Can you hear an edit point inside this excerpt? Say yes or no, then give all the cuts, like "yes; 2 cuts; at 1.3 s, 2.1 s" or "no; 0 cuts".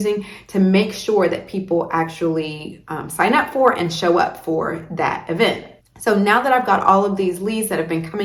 no; 0 cuts